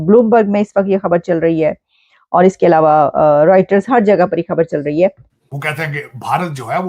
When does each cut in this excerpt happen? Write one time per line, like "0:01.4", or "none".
0:05.3